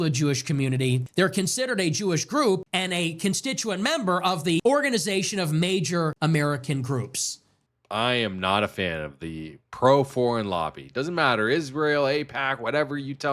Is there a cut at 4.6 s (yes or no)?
yes